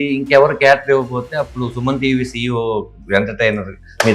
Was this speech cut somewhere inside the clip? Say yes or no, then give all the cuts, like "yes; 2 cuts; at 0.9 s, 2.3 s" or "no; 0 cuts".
no; 0 cuts